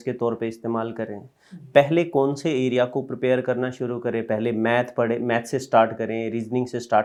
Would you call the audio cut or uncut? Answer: uncut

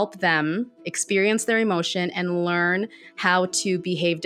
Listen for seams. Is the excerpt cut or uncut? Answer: uncut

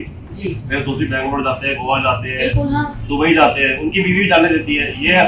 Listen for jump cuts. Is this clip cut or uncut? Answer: uncut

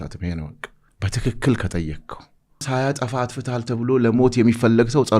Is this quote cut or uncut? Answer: cut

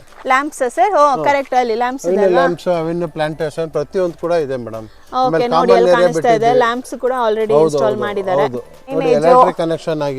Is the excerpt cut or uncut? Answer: cut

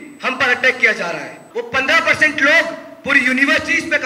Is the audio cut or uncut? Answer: cut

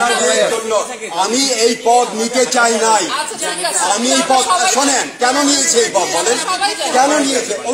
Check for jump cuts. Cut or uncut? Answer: uncut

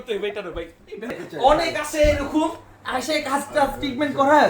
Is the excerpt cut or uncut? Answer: cut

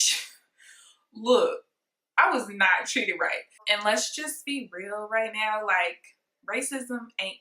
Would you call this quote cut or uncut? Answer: cut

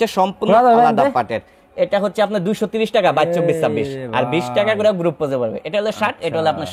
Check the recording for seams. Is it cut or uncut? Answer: uncut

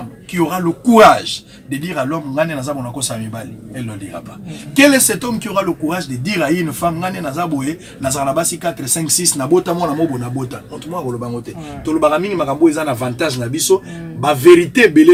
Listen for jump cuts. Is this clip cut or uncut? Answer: uncut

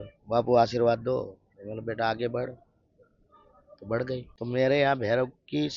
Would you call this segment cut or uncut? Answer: cut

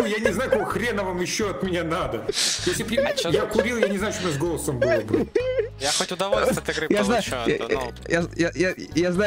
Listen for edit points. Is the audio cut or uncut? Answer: uncut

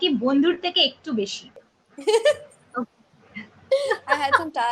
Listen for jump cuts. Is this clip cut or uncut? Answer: cut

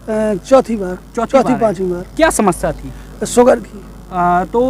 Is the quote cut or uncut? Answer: uncut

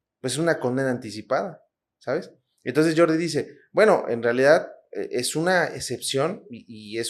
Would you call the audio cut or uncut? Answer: uncut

